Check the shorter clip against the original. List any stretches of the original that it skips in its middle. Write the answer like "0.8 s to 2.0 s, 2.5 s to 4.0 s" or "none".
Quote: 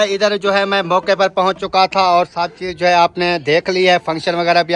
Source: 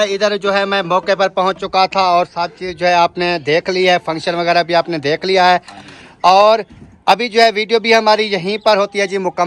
none